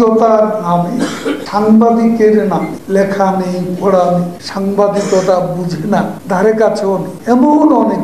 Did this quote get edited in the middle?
yes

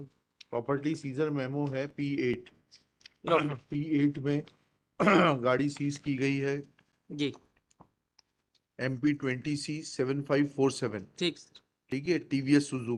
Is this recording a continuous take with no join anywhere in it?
yes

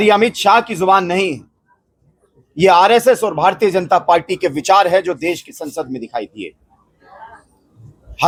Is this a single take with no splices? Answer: yes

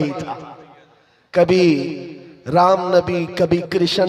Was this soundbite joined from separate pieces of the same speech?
no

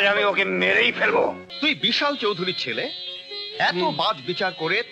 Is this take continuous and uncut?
no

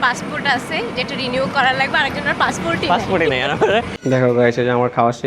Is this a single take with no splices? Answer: no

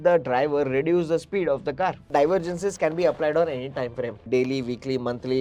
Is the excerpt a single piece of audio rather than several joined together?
no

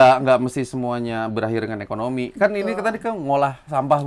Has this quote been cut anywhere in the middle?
no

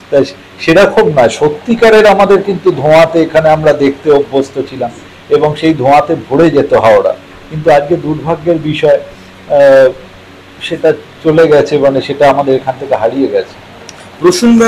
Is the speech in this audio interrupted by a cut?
no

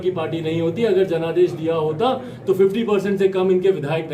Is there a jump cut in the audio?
no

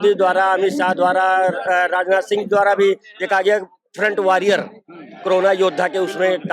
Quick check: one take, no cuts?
yes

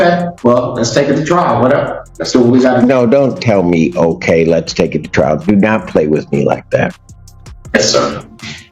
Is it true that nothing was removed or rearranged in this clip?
yes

